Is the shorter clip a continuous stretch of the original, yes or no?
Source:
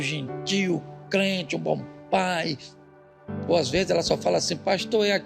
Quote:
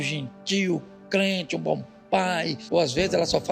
no